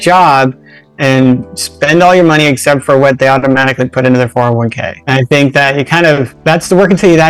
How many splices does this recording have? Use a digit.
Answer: 2